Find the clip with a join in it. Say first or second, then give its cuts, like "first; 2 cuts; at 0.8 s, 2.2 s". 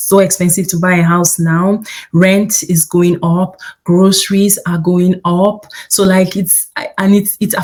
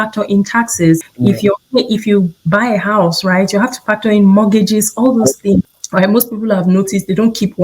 second; 2 cuts; at 1.1 s, 5.8 s